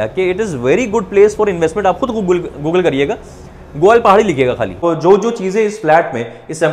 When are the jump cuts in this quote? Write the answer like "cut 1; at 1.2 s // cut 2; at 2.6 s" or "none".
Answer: cut 1; at 4.8 s